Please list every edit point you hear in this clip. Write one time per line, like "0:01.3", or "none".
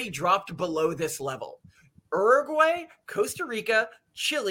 none